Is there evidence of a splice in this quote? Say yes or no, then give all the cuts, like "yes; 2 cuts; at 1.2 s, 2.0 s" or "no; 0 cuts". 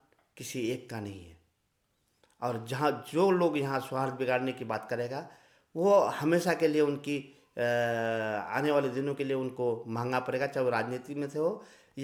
no; 0 cuts